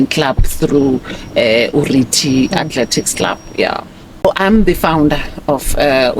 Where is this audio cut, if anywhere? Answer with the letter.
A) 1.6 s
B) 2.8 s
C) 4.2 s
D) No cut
C